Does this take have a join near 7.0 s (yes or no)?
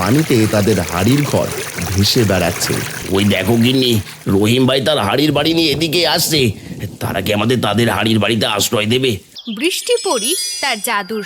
no